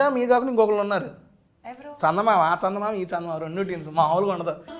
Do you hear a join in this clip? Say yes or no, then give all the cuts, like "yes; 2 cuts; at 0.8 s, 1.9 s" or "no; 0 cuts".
no; 0 cuts